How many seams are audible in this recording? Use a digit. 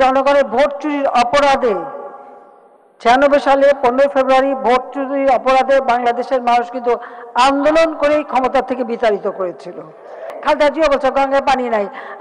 1